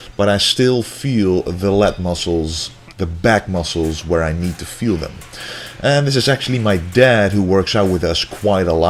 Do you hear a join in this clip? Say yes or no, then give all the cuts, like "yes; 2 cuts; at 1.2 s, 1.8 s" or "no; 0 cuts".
no; 0 cuts